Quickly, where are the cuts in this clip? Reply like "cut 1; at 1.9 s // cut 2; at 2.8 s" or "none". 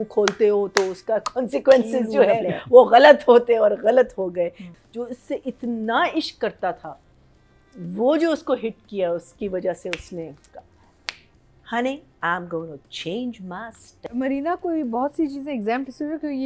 cut 1; at 4.7 s // cut 2; at 14.1 s